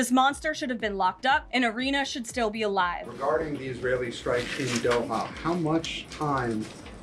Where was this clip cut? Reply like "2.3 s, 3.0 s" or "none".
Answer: 1.5 s, 3.1 s